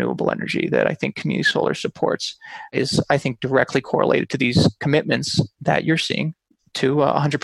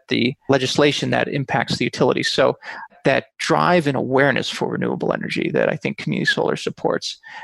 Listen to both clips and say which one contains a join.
second; 1 cut; at 3.0 s

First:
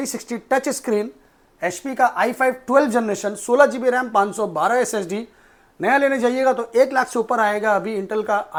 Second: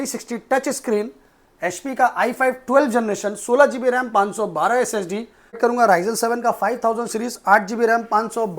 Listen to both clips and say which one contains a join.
second; 1 cut; at 5.6 s

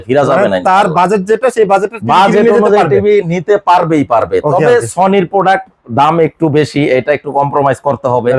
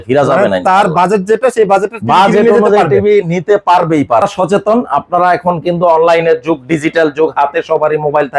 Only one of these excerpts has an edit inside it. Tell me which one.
second; 1 cut; at 4.2 s

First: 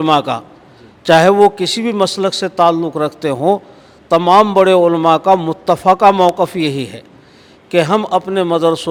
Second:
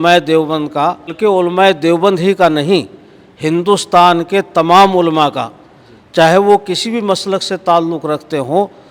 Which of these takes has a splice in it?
second; 1 cut; at 1.1 s

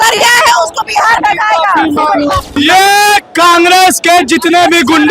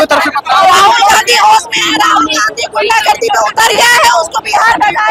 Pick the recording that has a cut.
first; 1 cut; at 2.5 s

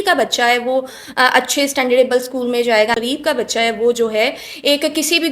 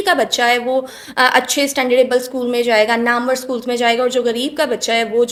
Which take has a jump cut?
first; 1 cut; at 3.0 s

